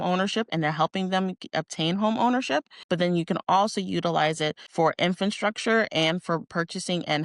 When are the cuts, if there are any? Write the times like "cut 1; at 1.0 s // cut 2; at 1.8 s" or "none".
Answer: cut 1; at 2.8 s // cut 2; at 4.6 s